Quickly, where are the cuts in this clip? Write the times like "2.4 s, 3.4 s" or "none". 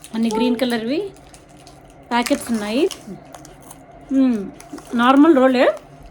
2.9 s